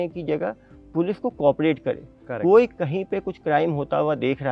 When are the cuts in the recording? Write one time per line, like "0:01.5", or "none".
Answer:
none